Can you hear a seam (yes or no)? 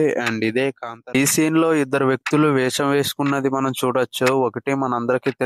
yes